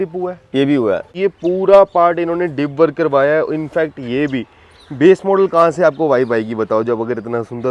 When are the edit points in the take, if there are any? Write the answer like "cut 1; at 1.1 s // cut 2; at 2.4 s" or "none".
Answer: cut 1; at 1.1 s